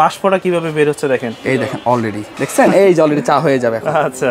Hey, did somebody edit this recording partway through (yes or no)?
yes